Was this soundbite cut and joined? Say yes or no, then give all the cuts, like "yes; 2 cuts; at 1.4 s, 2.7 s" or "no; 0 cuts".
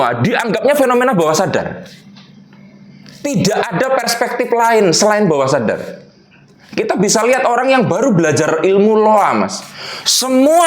no; 0 cuts